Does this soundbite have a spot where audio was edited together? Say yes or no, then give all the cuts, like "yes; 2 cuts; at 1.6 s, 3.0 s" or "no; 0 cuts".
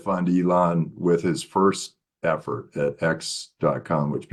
no; 0 cuts